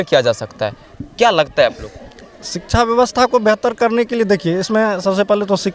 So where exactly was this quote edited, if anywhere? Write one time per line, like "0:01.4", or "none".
none